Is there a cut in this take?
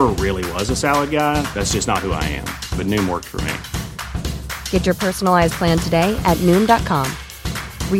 no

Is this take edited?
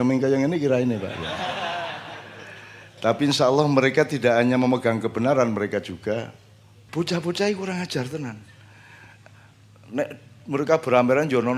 yes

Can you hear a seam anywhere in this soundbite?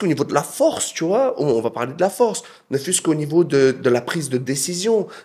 no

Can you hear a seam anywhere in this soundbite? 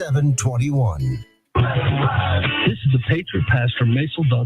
yes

